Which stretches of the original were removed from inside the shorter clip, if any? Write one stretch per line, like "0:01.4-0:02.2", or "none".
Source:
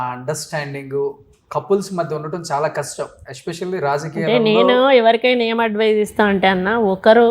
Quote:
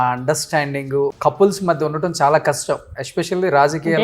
0:01.2-0:01.5